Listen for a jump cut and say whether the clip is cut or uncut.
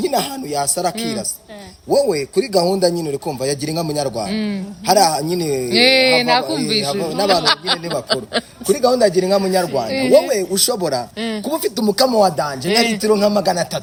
uncut